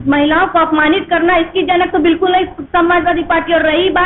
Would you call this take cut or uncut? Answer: uncut